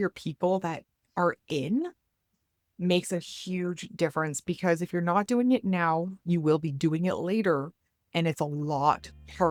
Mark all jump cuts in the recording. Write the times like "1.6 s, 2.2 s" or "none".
none